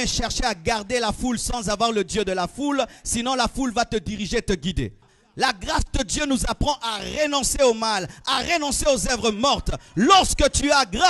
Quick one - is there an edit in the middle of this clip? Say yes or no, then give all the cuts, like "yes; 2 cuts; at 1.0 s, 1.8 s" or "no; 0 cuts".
yes; 1 cut; at 5.1 s